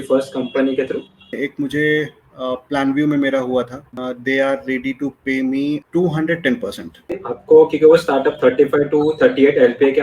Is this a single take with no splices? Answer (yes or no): no